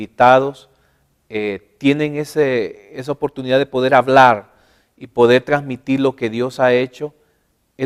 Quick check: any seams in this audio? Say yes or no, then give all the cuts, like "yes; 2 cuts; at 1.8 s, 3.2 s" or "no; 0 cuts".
no; 0 cuts